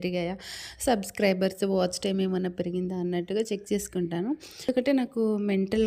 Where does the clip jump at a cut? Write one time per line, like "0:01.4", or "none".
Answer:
0:04.7